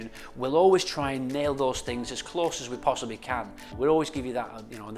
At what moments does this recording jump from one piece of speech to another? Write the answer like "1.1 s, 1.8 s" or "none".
3.6 s